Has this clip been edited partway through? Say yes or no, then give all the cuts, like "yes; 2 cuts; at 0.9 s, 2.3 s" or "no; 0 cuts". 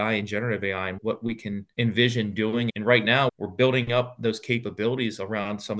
yes; 1 cut; at 2.7 s